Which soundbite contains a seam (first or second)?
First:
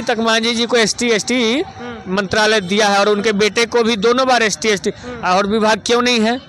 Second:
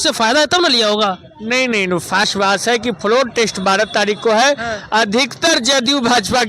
second